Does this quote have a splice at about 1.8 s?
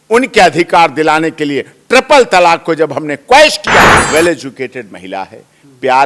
no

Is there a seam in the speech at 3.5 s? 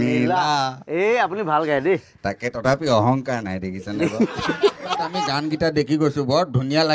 no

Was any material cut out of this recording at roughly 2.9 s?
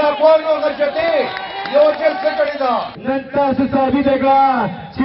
yes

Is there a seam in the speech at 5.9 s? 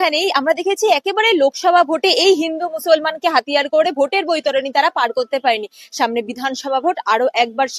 no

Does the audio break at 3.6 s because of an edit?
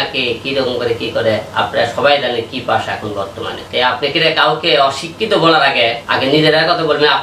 yes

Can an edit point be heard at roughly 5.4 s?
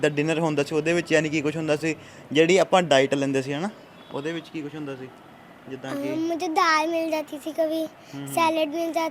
no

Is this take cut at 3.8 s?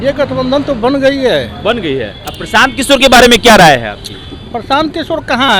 no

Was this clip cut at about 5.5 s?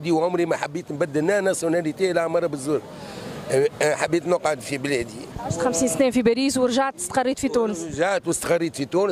no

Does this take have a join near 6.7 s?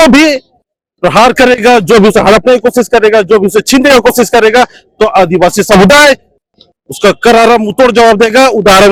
no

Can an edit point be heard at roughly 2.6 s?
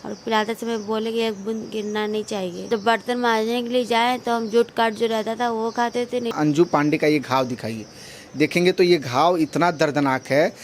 yes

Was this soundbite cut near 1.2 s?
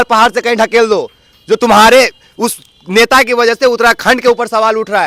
no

